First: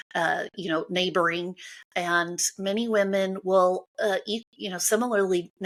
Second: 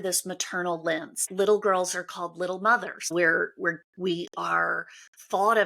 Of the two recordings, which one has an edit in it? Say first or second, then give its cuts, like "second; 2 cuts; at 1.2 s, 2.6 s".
second; 2 cuts; at 1.3 s, 3.1 s